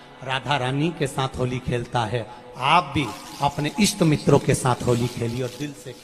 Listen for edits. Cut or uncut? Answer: uncut